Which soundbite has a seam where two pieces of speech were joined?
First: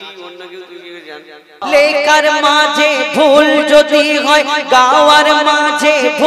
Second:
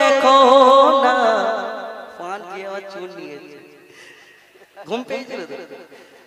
first; 1 cut; at 1.6 s

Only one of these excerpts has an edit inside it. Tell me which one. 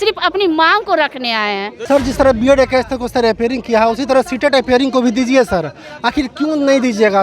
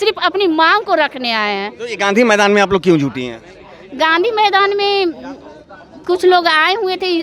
first; 1 cut; at 1.7 s

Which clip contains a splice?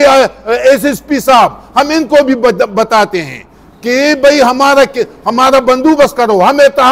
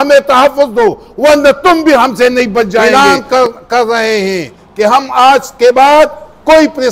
second; 1 cut; at 2.9 s

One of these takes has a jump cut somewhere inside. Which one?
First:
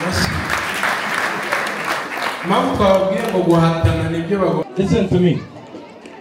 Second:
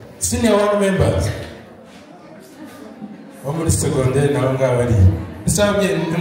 first; 1 cut; at 4.7 s

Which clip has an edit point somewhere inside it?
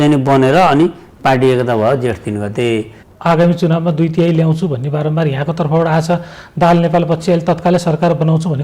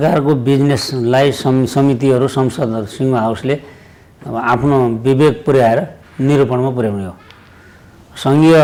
first; 1 cut; at 3.0 s

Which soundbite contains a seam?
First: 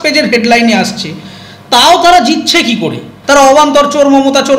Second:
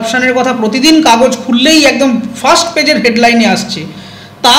first; 1 cut; at 3.1 s

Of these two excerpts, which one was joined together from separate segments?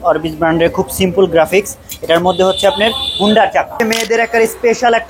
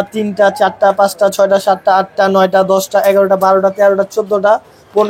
first; 1 cut; at 3.7 s

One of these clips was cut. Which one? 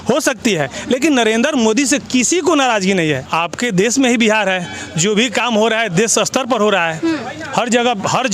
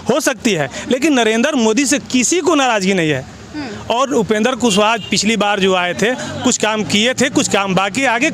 first; 1 cut; at 3.3 s

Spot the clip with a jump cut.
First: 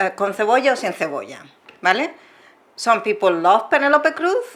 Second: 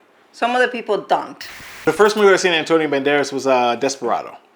second; 1 cut; at 1.7 s

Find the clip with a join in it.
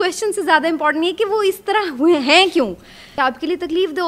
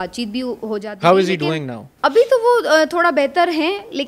first; 1 cut; at 3.0 s

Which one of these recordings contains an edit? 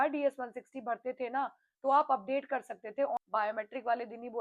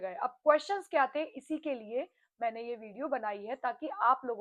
first; 1 cut; at 3.2 s

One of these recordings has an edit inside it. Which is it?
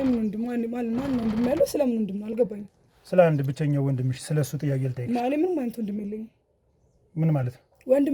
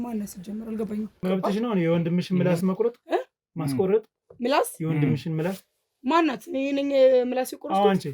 second; 1 cut; at 1.1 s

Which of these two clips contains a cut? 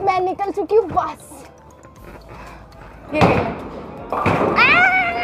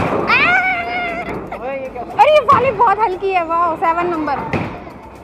first; 1 cut; at 3.1 s

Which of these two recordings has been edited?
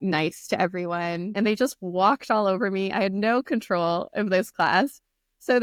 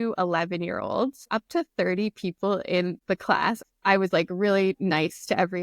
second; 2 cuts; at 1.2 s, 3.5 s

